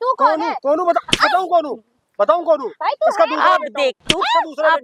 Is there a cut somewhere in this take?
no; 0 cuts

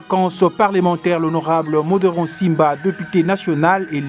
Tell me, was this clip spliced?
no; 0 cuts

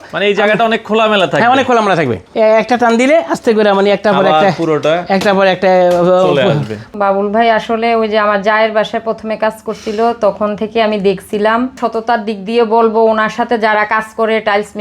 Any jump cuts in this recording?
yes; 3 cuts; at 2.2 s, 6.9 s, 11.8 s

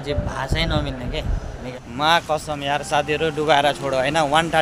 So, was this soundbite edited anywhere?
yes; 1 cut; at 1.7 s

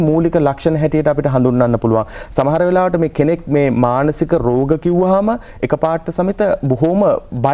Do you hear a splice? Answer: no; 0 cuts

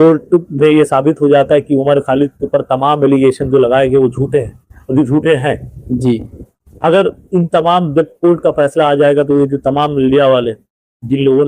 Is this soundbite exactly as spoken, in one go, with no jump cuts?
yes; 0 cuts

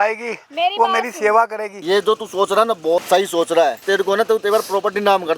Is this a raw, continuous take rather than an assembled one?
no; 3 cuts; at 1.7 s, 3.0 s, 3.8 s

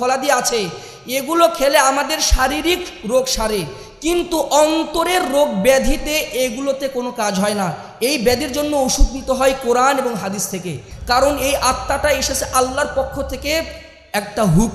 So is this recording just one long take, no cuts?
yes; 0 cuts

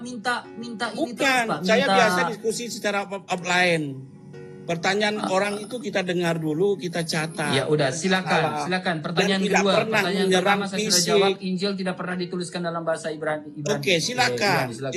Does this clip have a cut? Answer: no; 0 cuts

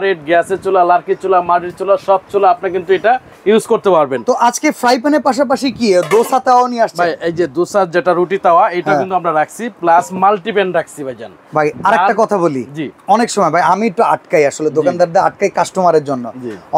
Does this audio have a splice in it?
no; 0 cuts

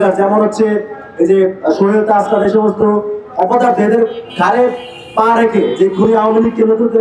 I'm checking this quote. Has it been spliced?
no; 0 cuts

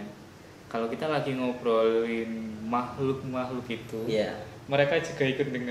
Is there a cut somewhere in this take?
no; 0 cuts

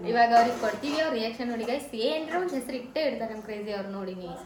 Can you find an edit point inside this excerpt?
no; 0 cuts

